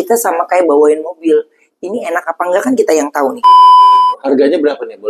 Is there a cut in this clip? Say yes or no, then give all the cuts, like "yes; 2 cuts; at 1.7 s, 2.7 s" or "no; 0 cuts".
yes; 2 cuts; at 3.3 s, 4.2 s